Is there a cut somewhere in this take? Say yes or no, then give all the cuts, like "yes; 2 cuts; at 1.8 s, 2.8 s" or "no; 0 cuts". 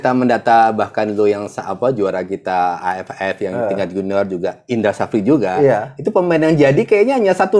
no; 0 cuts